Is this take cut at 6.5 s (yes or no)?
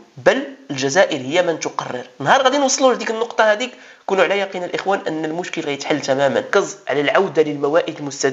yes